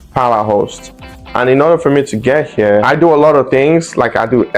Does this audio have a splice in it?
no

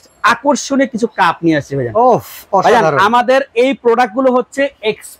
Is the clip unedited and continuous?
yes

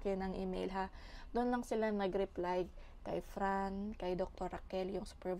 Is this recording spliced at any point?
no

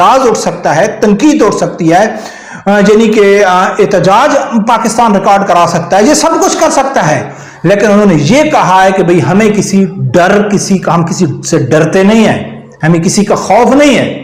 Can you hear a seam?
no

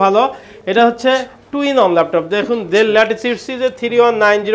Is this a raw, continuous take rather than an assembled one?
yes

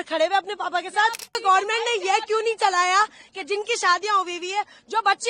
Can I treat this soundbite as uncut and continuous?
no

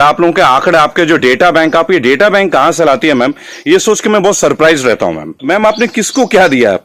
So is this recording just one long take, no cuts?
no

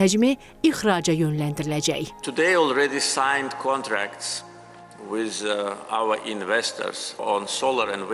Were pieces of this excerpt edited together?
yes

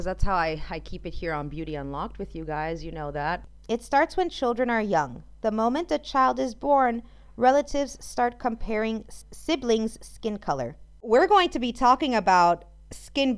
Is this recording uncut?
no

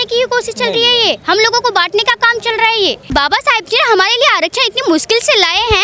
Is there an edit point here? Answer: yes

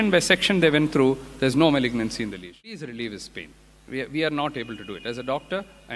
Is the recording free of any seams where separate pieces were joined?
no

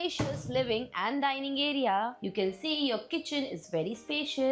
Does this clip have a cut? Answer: yes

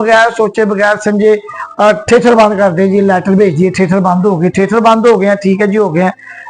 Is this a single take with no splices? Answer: yes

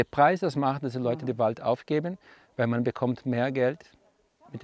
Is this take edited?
no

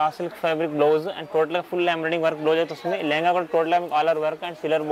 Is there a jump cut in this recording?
no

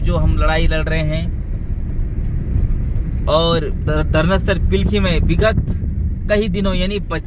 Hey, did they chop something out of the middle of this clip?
no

